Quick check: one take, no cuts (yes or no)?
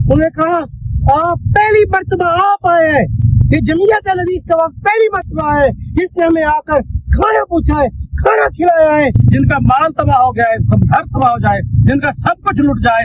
no